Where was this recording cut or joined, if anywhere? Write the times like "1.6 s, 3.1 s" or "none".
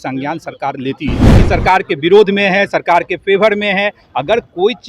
1.3 s